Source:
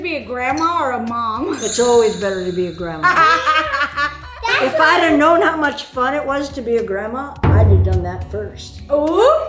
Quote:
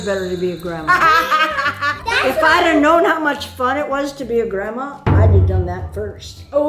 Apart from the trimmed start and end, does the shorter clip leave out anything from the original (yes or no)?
yes